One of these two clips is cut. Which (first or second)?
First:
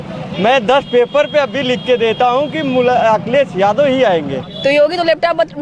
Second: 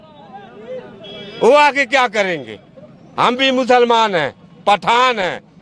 first